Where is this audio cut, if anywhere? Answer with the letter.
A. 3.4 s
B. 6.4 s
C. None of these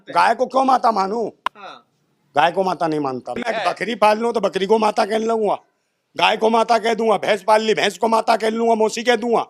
A